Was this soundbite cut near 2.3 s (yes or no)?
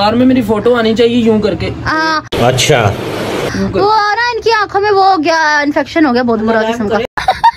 no